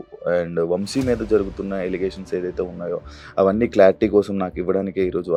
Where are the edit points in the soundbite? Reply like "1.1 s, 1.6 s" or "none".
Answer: none